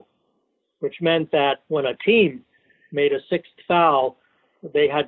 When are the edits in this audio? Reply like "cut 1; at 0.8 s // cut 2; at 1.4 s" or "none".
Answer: cut 1; at 1.6 s